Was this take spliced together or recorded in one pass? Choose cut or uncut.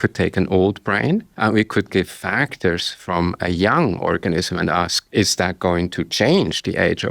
cut